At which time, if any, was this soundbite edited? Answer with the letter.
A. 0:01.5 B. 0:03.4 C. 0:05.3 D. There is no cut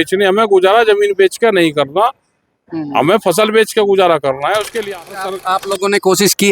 C